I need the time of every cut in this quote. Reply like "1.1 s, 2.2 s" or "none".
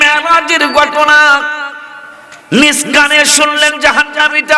none